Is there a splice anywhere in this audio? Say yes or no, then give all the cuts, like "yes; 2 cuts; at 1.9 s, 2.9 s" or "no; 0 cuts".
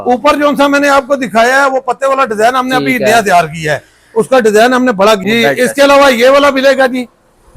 yes; 1 cut; at 5.2 s